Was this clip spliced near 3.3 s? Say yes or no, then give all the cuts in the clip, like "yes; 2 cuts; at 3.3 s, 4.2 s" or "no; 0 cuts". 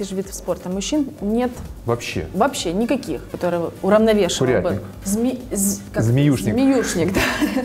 yes; 2 cuts; at 3.3 s, 4.9 s